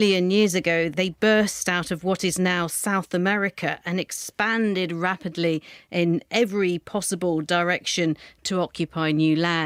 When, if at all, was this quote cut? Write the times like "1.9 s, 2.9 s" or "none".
none